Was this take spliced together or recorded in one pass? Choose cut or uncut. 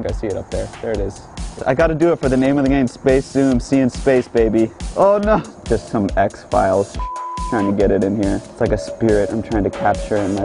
cut